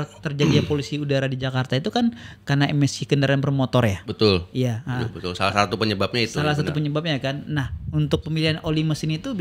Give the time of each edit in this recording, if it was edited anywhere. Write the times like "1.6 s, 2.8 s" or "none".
none